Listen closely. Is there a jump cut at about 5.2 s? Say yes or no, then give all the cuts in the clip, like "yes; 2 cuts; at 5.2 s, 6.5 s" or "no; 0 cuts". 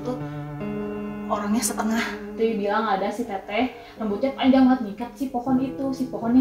no; 1 cut; at 2.3 s